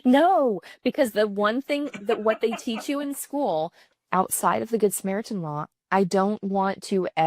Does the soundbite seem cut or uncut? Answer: cut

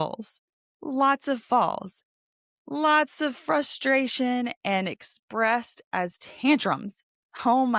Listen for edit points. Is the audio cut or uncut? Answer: uncut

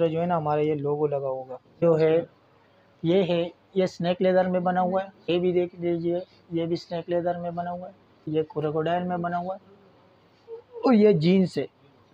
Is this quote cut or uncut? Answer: cut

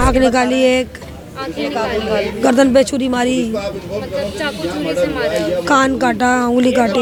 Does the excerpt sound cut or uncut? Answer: uncut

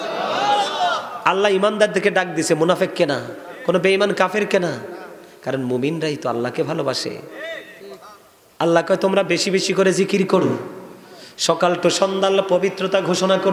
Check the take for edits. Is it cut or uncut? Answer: uncut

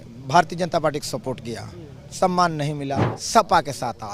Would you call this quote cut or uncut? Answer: cut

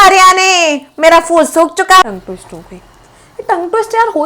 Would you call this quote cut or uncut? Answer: cut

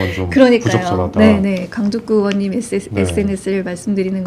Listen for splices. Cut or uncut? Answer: uncut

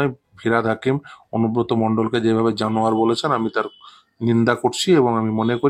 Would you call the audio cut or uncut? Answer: uncut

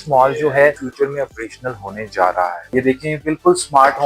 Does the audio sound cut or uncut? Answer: cut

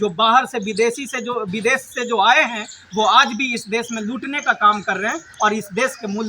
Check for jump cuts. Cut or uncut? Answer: uncut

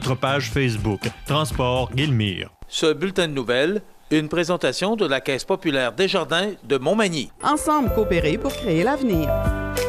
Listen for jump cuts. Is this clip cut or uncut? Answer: cut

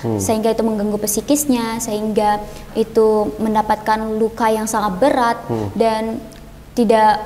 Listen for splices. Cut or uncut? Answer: uncut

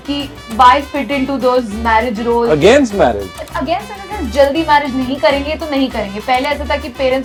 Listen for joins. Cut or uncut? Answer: uncut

